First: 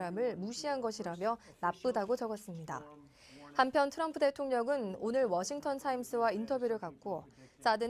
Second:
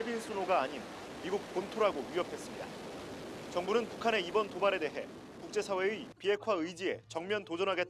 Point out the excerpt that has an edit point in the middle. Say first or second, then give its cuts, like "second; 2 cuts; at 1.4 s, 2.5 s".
first; 1 cut; at 2.5 s